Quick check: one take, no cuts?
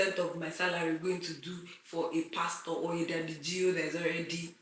yes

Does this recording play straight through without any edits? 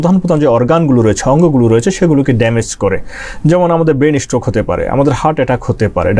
yes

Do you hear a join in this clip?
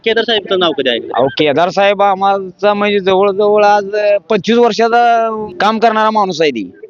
yes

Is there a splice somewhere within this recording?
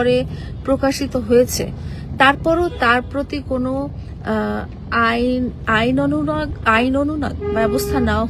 no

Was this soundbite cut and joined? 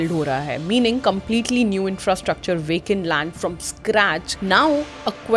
yes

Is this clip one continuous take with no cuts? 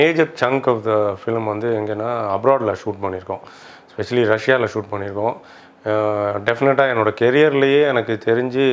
yes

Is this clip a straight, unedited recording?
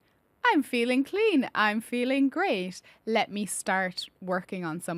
yes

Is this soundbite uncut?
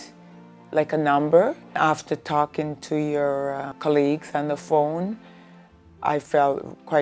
no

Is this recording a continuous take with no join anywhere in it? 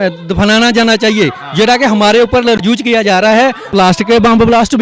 no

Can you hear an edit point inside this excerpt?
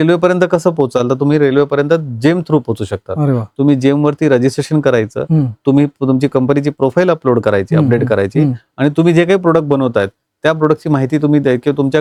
no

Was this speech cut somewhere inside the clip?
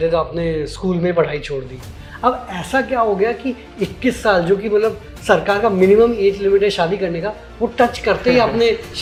no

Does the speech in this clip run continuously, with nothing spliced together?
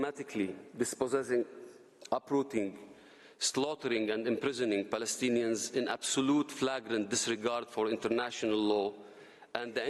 yes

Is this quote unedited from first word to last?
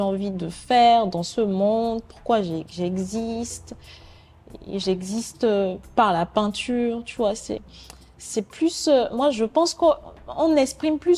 yes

